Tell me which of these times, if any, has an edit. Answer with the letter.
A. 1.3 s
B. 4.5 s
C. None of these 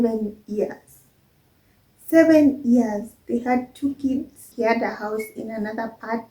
B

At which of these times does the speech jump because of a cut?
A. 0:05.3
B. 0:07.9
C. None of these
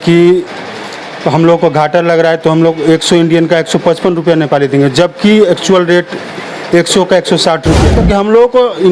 B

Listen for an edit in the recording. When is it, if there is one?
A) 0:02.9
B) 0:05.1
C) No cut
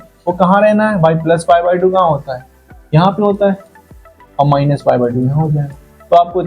C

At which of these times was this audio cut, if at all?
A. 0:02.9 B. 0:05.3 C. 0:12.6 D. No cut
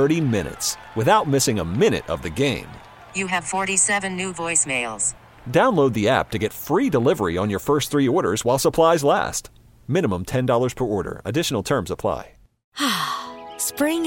C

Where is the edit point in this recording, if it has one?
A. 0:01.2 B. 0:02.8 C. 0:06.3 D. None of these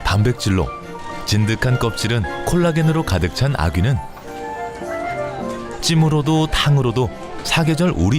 C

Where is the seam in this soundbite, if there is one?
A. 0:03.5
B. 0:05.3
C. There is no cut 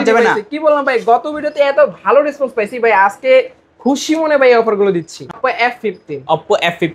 B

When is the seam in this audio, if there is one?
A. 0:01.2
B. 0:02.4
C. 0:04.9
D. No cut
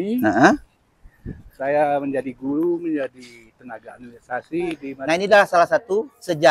C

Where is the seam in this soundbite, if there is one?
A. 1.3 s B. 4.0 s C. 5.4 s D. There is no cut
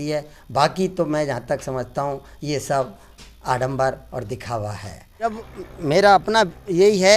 C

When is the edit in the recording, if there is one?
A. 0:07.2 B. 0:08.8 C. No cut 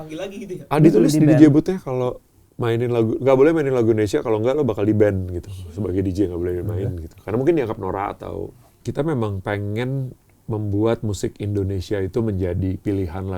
B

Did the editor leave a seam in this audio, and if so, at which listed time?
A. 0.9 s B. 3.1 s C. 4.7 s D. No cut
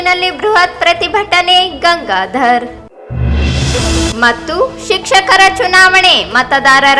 D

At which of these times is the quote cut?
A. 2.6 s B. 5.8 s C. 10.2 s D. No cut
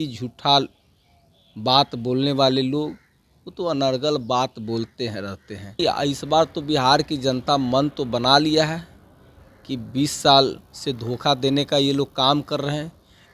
B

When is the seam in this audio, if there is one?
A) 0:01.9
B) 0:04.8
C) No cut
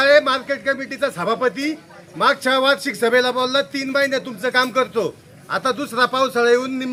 C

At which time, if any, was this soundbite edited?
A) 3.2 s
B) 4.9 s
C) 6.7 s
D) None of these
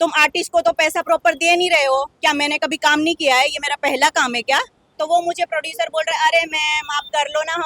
B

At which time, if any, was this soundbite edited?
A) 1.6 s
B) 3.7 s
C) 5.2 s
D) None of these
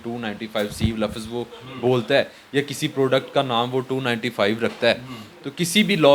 D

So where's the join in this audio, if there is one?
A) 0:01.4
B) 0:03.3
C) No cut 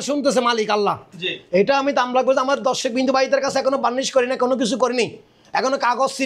C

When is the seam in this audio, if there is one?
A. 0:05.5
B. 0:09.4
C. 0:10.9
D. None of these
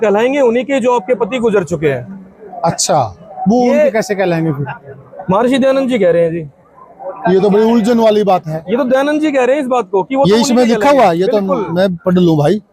D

